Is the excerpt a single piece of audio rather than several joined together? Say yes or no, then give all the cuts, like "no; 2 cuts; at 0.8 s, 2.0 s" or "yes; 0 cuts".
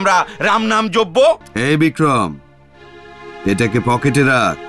no; 1 cut; at 1.5 s